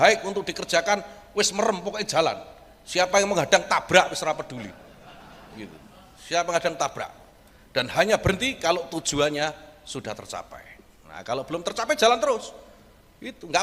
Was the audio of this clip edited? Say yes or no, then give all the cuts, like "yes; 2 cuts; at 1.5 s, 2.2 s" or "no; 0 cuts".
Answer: no; 0 cuts